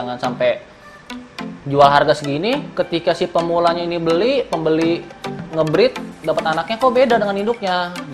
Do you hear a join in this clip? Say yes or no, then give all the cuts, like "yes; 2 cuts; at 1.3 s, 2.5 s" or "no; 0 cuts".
no; 0 cuts